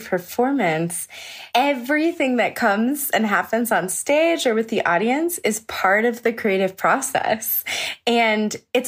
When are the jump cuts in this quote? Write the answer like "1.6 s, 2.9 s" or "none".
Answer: 1.5 s